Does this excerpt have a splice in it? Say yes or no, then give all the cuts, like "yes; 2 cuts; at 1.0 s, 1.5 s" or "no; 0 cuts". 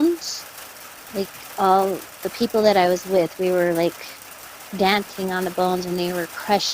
no; 0 cuts